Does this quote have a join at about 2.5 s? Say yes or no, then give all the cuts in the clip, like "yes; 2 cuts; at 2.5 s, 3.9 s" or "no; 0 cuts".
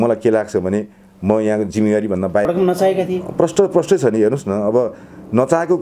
yes; 1 cut; at 2.5 s